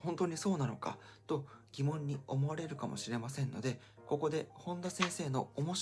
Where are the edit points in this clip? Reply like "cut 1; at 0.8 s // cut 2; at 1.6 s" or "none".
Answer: none

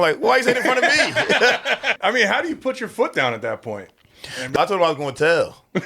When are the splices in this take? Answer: cut 1; at 1.8 s // cut 2; at 4.5 s

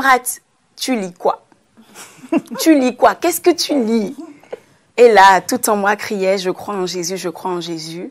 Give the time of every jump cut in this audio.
none

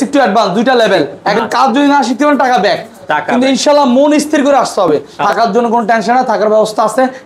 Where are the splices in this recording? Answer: cut 1; at 1.2 s // cut 2; at 5.1 s

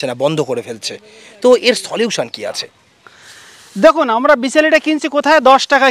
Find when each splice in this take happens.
cut 1; at 2.7 s

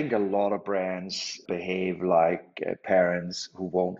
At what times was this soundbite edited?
cut 1; at 1.4 s

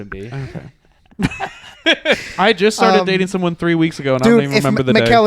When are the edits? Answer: cut 1; at 2.2 s

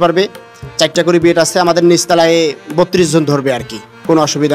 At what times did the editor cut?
none

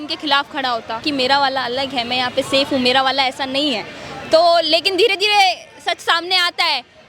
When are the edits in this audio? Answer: cut 1; at 1.0 s

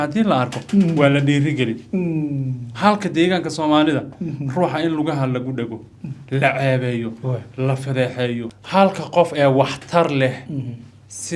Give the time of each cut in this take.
cut 1; at 8.5 s

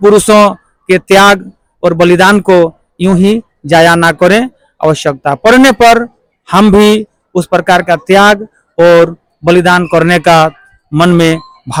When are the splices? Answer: none

